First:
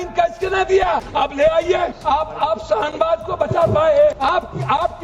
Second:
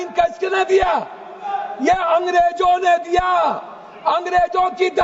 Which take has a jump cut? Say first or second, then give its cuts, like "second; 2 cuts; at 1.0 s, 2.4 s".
first; 3 cuts; at 1.1 s, 2.0 s, 4.2 s